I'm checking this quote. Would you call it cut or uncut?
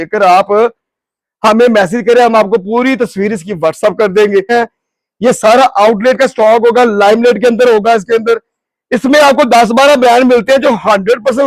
cut